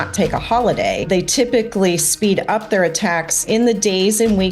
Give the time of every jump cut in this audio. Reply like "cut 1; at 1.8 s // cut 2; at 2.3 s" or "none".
cut 1; at 1.1 s // cut 2; at 3.4 s